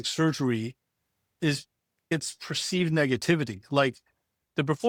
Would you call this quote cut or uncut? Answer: uncut